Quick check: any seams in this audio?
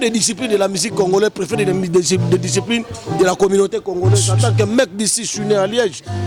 no; 0 cuts

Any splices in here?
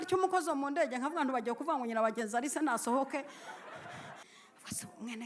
yes; 1 cut; at 4.2 s

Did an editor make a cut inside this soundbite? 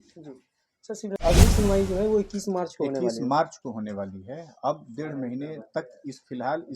yes; 1 cut; at 1.2 s

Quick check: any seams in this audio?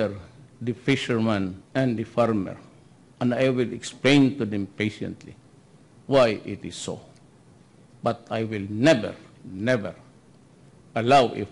yes; 1 cut; at 1.6 s

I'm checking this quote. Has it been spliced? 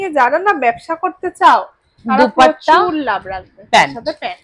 no; 0 cuts

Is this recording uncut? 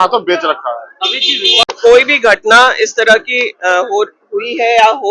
no; 1 cut; at 1.7 s

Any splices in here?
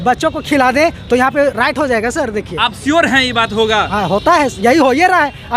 no; 0 cuts

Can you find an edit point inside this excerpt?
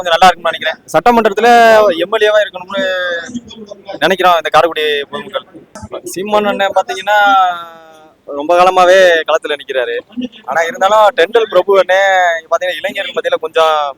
yes; 1 cut; at 5.6 s

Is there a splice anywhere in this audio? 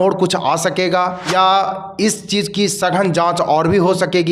yes; 1 cut; at 1.2 s

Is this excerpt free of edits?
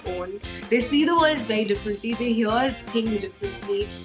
yes; 0 cuts

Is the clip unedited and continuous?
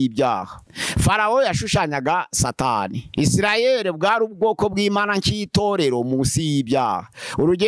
yes; 0 cuts

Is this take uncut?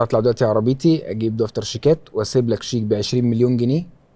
yes; 0 cuts

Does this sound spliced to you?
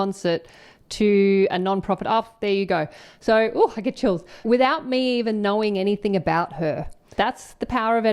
yes; 1 cut; at 7.1 s

